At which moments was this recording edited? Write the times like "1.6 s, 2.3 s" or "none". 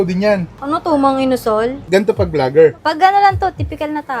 1.8 s